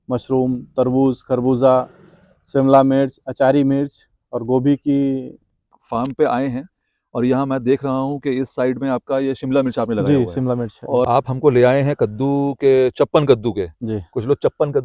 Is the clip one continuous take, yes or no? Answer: no